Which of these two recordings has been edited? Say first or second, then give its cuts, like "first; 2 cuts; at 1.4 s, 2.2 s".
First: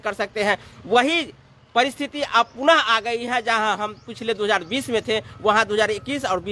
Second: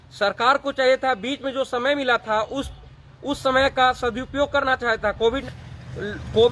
second; 1 cut; at 5.4 s